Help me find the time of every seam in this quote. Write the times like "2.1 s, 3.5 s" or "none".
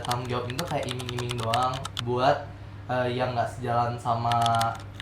none